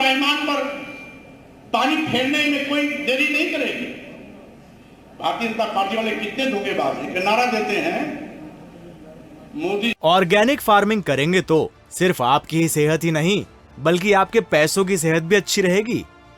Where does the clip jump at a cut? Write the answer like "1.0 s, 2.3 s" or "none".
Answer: 10.0 s

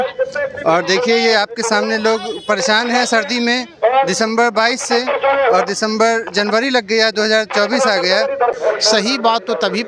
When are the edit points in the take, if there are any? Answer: 8.5 s

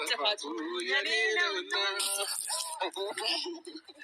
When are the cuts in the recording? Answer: 2.4 s

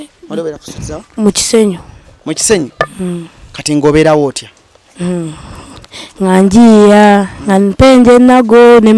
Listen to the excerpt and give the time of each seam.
none

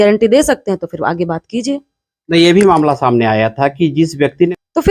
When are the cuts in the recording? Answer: none

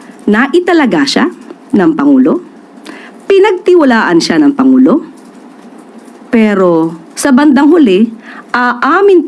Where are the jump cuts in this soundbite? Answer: none

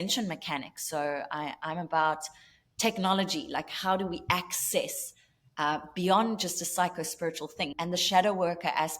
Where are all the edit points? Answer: 7.7 s

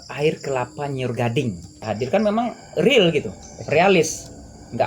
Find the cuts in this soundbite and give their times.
1.8 s

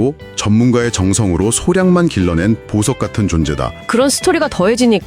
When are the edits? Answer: 3.8 s

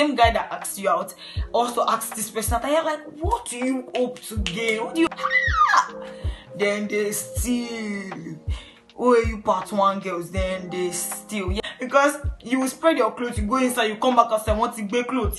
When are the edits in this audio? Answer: 5.1 s, 11.6 s

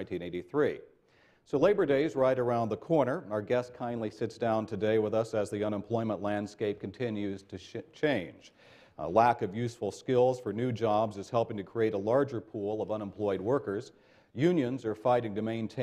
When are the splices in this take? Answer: 0.9 s

